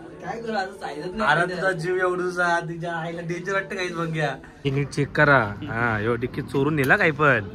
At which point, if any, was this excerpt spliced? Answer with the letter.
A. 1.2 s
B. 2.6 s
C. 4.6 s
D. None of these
C